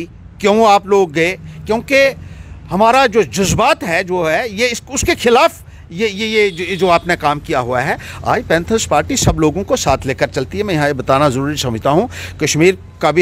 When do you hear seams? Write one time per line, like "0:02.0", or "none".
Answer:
none